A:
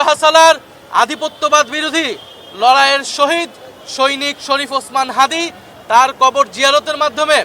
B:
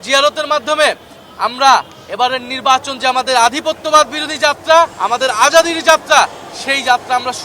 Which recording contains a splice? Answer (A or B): B